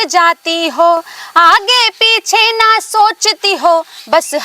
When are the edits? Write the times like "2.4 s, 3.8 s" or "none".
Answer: none